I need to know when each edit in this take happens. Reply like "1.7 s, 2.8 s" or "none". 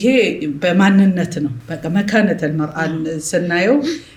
none